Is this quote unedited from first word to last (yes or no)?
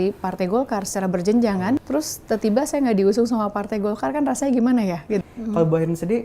no